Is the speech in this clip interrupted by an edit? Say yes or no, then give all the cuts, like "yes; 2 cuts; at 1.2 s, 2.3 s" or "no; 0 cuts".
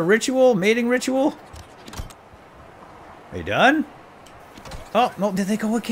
no; 0 cuts